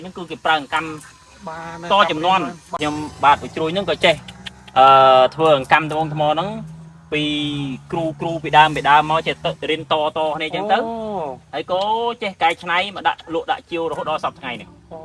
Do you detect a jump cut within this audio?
yes; 1 cut; at 2.7 s

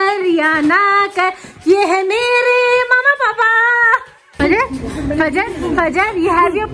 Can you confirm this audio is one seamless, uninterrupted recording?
no; 1 cut; at 4.2 s

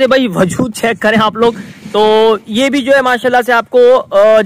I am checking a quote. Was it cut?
no; 0 cuts

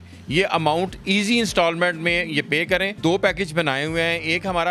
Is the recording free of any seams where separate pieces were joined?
no; 1 cut; at 3.0 s

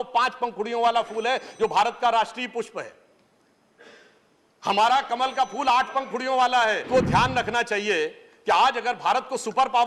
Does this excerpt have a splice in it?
yes; 1 cut; at 6.9 s

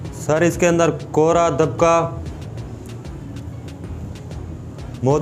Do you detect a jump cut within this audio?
no; 0 cuts

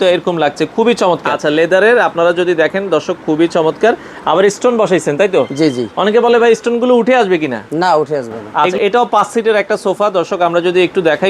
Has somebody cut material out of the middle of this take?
yes; 2 cuts; at 1.4 s, 8.4 s

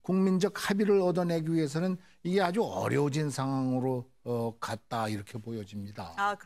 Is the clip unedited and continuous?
no; 1 cut; at 2.9 s

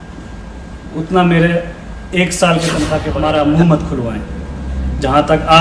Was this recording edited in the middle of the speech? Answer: yes; 1 cut; at 3.1 s

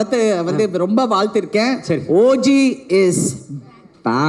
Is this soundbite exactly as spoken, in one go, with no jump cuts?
yes; 0 cuts

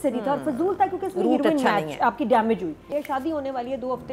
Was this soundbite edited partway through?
yes; 1 cut; at 2.9 s

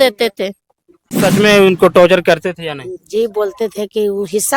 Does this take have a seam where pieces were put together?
yes; 1 cut; at 1.2 s

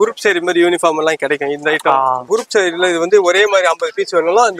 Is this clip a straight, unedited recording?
no; 1 cut; at 2.3 s

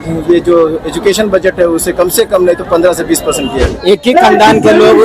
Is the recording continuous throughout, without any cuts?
no; 1 cut; at 3.6 s

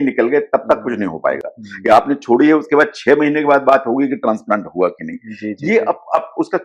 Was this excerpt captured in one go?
yes; 0 cuts

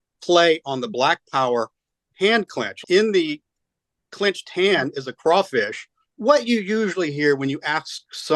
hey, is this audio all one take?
no; 2 cuts; at 2.8 s, 6.1 s

